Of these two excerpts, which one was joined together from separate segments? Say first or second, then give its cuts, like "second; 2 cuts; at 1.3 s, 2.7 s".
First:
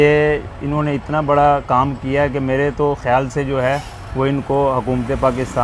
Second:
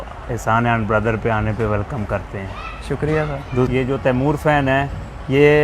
second; 1 cut; at 3.7 s